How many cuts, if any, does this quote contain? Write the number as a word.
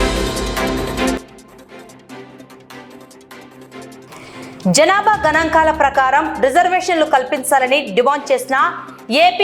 one